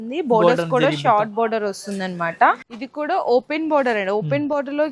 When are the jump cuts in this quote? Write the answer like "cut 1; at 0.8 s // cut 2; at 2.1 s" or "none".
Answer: cut 1; at 2.8 s